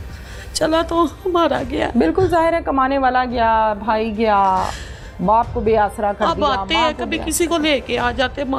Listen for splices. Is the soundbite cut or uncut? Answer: uncut